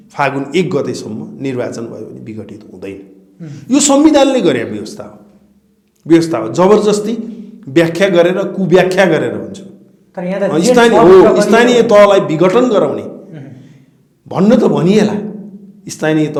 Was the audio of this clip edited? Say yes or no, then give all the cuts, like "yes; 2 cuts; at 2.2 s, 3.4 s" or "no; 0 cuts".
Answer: no; 0 cuts